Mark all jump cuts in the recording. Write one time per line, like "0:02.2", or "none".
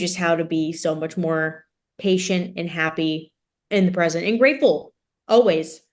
none